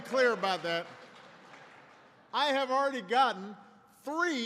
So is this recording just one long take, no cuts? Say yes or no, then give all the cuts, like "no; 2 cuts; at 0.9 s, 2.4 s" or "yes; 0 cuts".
yes; 0 cuts